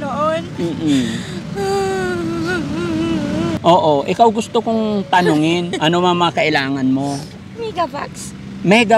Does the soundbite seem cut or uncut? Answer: cut